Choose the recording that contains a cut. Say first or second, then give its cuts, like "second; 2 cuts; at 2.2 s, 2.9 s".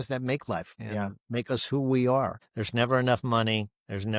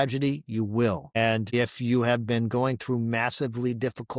first; 1 cut; at 2.4 s